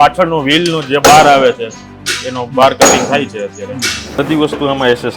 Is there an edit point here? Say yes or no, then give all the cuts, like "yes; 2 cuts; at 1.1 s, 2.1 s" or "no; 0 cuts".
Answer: yes; 1 cut; at 4.0 s